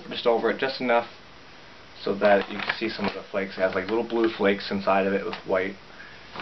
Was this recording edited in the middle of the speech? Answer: no; 0 cuts

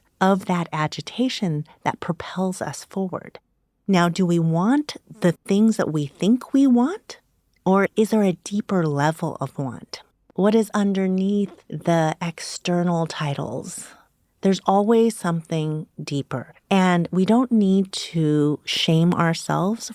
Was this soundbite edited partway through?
yes; 1 cut; at 10.2 s

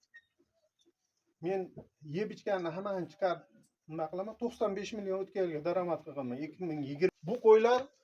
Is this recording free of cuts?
no; 1 cut; at 7.1 s

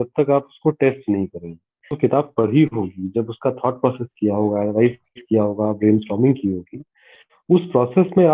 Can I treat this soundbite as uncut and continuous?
no; 1 cut; at 1.9 s

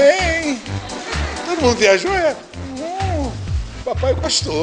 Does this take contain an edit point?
no; 0 cuts

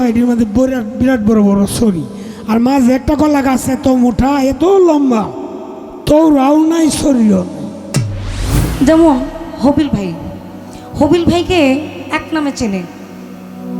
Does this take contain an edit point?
yes; 1 cut; at 8.6 s

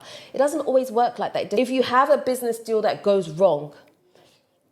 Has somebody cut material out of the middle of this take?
yes; 1 cut; at 1.5 s

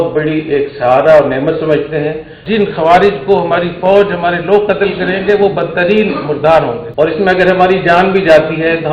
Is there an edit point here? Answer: yes; 2 cuts; at 2.4 s, 6.8 s

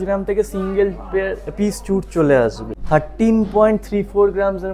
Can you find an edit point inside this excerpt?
yes; 1 cut; at 2.7 s

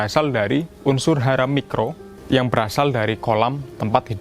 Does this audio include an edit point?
yes; 1 cut; at 2.0 s

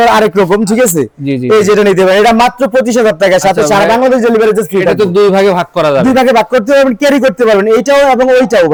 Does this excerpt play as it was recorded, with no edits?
yes; 0 cuts

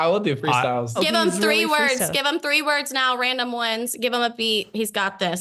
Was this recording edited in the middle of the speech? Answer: yes; 1 cut; at 1.0 s

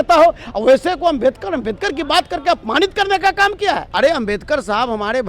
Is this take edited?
yes; 1 cut; at 3.9 s

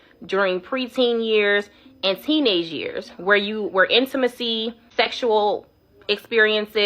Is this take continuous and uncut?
no; 1 cut; at 4.8 s

